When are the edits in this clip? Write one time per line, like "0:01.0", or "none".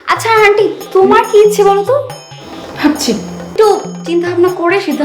0:03.5